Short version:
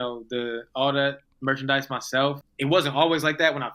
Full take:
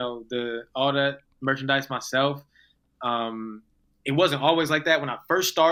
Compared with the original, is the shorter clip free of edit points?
no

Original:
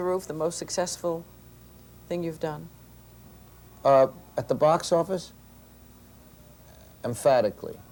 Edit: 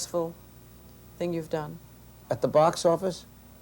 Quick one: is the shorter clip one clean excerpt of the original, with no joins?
no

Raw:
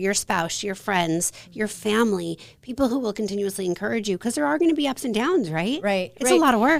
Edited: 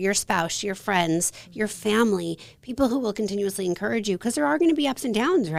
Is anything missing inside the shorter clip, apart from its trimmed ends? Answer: no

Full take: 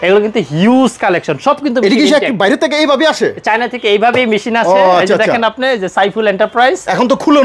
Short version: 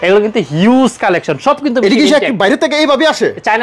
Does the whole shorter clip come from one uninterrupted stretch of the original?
yes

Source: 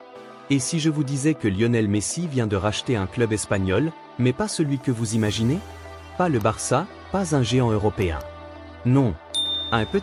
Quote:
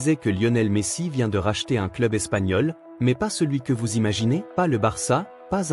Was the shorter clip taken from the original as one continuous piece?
no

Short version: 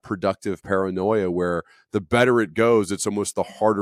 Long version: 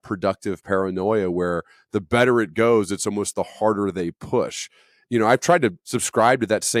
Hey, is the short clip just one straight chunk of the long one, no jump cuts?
yes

